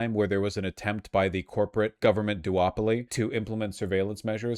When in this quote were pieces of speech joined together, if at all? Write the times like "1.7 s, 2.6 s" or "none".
1.9 s, 3.1 s

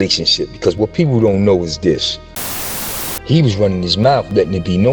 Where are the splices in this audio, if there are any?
2.8 s

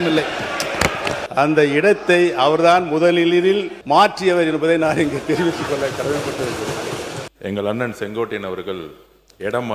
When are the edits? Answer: 1.2 s, 3.7 s, 7.2 s

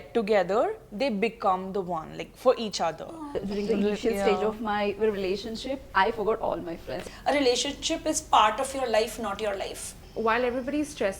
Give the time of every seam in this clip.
3.4 s, 7.0 s, 9.9 s

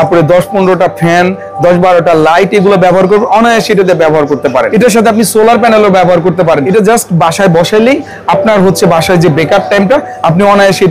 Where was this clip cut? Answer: 4.7 s, 6.6 s

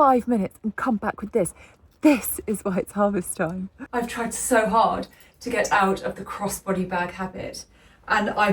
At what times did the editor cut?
3.8 s

